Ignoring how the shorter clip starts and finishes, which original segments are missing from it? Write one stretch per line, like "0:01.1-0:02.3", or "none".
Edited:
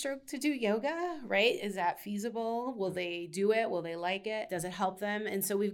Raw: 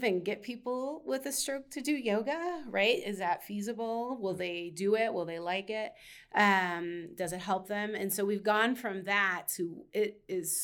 0:05.9-0:07.2